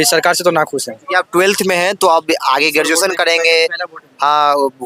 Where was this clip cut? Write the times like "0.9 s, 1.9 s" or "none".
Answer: none